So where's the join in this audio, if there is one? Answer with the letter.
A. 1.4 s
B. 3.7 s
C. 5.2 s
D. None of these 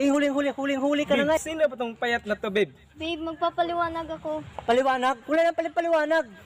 A